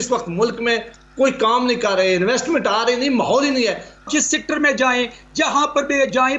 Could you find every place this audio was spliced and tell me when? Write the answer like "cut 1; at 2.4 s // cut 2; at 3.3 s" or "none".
cut 1; at 4.1 s